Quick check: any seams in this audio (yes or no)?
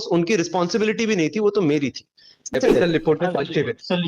yes